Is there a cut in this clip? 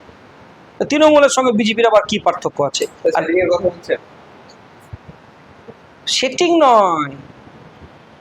no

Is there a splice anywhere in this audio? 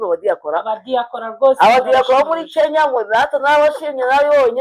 no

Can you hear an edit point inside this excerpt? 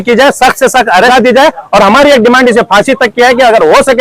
yes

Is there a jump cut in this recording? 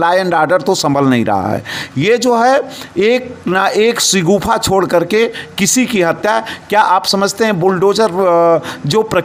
no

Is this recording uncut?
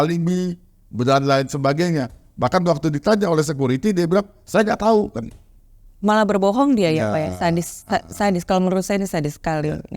yes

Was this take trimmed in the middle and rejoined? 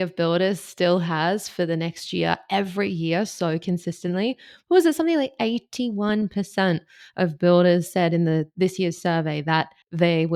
no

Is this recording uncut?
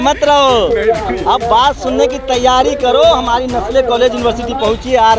yes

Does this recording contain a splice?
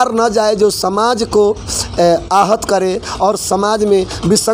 no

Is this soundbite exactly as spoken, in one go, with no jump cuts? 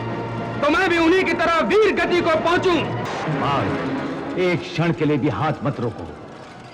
no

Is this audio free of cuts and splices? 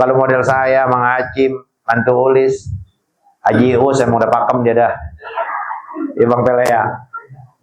yes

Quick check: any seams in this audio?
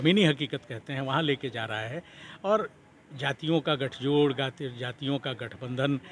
no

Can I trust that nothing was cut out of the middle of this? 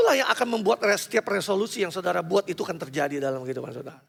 yes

